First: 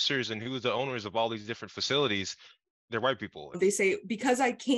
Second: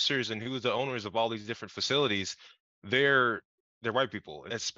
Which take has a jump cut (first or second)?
first